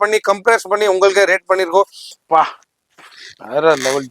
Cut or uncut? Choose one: cut